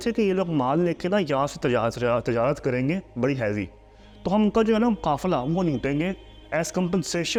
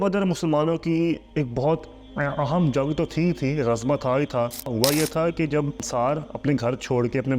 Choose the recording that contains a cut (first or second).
second